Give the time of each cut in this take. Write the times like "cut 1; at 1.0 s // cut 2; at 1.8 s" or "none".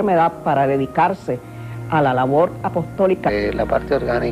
none